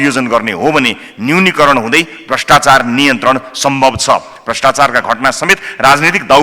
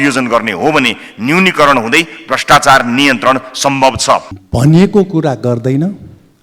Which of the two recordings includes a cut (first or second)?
second